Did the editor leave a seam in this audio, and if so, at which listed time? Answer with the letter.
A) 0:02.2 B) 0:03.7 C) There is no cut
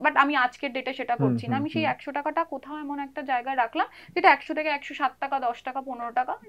C